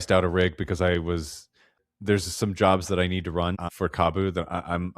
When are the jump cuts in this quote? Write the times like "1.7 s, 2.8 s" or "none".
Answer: 1.8 s, 3.7 s